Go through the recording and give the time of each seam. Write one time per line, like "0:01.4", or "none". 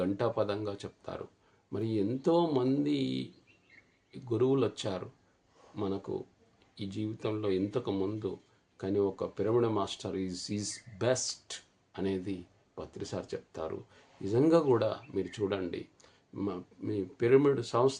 none